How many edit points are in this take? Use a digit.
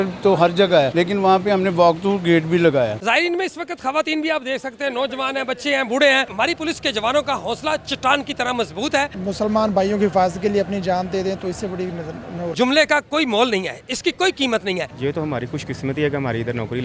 6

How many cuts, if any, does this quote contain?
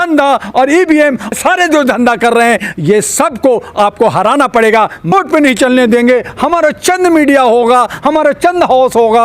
2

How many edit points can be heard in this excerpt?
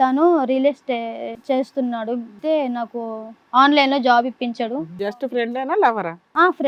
3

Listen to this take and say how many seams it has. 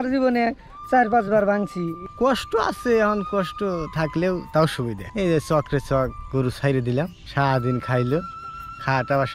3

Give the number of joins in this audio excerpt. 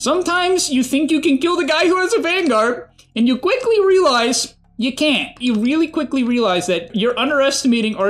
2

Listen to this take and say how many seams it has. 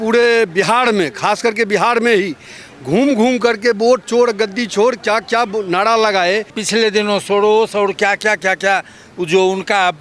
1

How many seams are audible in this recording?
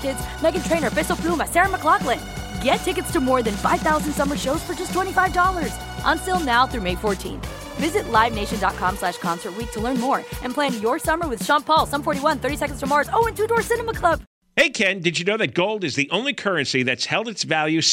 1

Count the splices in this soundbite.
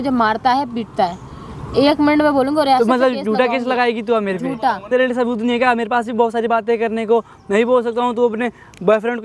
0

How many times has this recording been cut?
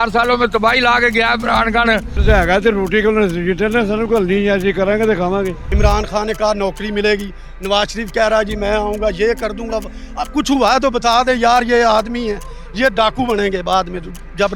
2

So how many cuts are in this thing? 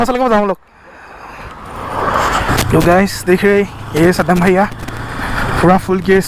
1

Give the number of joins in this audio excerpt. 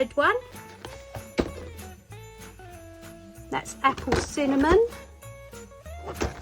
2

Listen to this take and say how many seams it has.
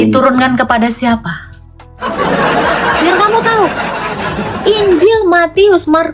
1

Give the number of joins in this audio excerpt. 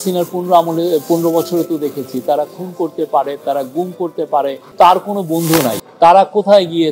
2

